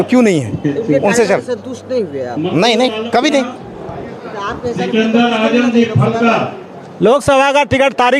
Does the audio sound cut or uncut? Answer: cut